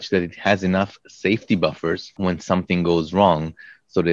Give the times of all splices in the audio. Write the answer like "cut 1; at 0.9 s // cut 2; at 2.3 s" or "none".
cut 1; at 2.1 s